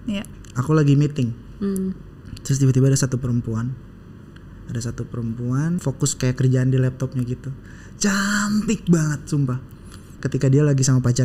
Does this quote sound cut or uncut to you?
cut